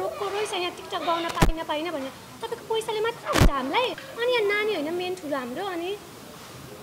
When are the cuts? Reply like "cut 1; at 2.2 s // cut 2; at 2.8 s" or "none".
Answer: none